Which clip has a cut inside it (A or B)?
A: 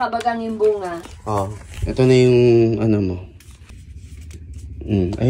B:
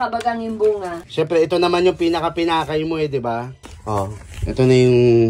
A